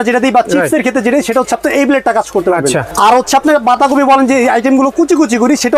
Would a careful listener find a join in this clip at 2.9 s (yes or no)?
yes